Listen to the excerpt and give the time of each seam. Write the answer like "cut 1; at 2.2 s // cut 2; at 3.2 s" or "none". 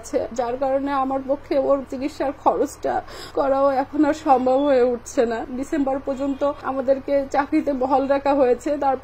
cut 1; at 5.4 s // cut 2; at 6.6 s